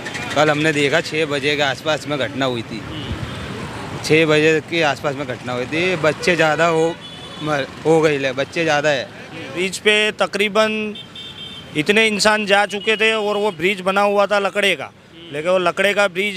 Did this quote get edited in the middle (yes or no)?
yes